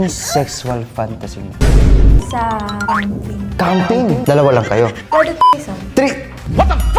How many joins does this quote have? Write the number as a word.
one